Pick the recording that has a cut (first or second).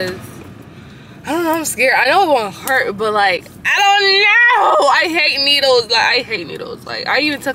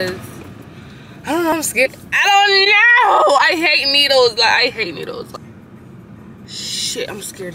second